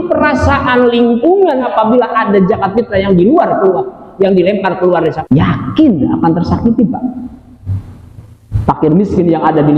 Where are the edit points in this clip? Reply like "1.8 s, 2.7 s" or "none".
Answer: 1.6 s, 5.2 s